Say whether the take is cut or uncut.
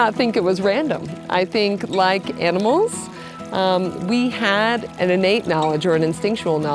cut